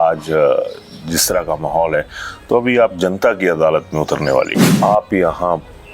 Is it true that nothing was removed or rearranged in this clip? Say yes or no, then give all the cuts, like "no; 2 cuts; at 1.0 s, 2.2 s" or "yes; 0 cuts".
no; 1 cut; at 4.7 s